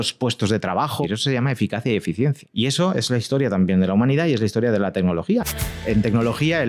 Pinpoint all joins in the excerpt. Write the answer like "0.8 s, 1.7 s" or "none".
1.0 s, 2.4 s, 5.8 s